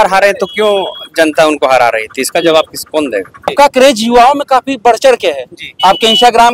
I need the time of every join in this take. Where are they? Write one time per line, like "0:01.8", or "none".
0:03.5